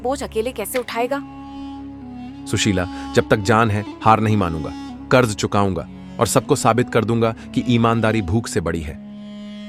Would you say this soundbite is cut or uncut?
uncut